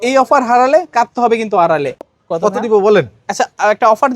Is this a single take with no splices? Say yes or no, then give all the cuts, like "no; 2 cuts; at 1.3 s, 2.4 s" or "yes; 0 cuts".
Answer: no; 1 cut; at 2.2 s